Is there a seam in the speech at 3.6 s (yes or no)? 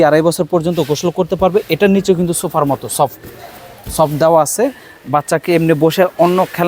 no